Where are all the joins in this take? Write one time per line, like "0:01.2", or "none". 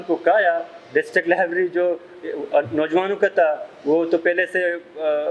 none